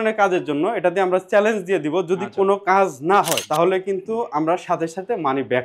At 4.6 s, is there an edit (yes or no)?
no